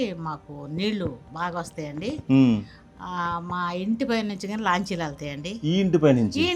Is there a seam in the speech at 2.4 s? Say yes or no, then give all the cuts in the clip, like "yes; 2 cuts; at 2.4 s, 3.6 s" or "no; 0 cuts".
no; 0 cuts